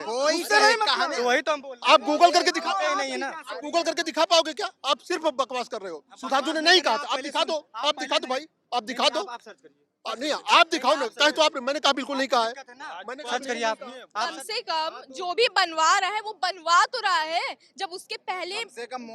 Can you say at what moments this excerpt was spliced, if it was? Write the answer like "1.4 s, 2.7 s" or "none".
14.0 s